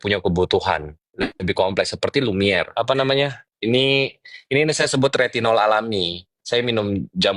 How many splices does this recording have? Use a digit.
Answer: 1